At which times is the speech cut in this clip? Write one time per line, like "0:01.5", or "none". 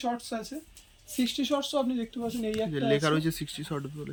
none

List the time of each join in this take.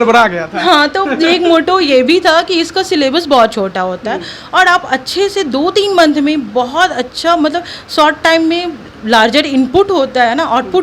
none

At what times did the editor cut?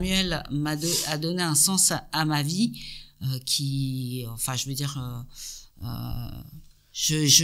none

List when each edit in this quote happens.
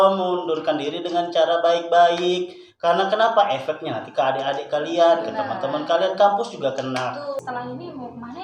0:07.3

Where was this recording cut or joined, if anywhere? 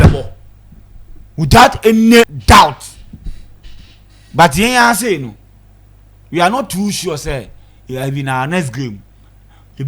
0:02.3

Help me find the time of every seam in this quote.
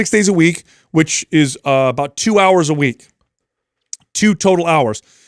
none

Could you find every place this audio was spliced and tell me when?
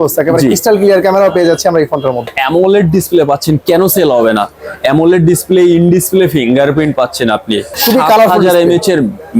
0:02.3
0:07.8

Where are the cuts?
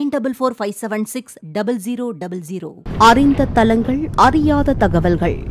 0:02.8

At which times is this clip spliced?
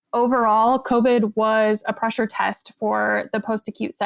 none

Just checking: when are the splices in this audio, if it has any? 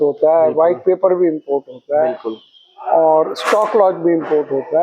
none

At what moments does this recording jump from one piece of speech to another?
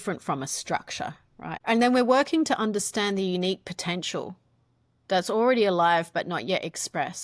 0:01.6

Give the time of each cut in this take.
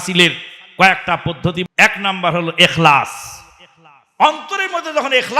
0:01.6

